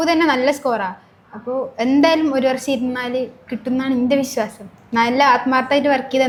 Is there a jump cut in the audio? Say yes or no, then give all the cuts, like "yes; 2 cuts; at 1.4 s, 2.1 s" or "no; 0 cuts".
no; 0 cuts